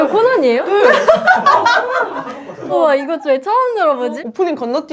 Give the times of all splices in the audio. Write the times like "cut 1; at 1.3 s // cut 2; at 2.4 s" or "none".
cut 1; at 2.6 s